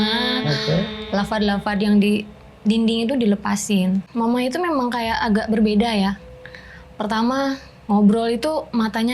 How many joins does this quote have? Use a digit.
1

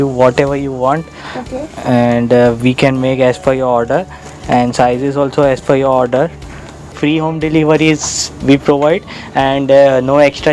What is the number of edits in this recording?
1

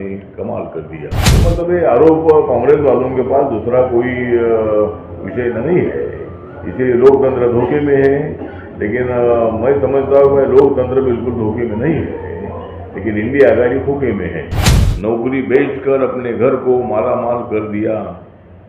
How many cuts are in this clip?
2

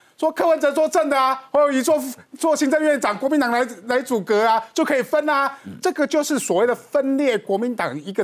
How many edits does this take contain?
0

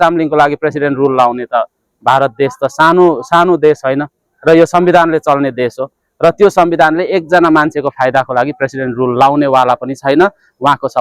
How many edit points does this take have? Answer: 0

